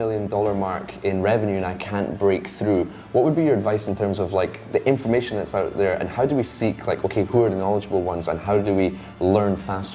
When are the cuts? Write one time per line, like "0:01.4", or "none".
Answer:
none